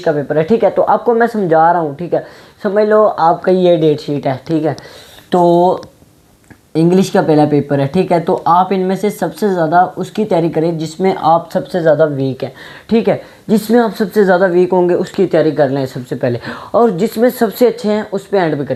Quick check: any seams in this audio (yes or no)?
no